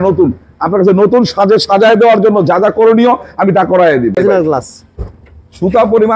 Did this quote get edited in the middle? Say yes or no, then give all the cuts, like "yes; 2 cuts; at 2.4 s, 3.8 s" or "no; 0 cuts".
yes; 1 cut; at 4.2 s